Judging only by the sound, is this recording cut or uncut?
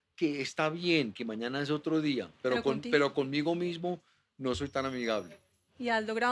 uncut